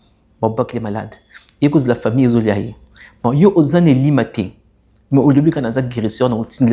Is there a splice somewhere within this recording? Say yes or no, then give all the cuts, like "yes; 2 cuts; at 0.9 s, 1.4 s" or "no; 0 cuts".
no; 0 cuts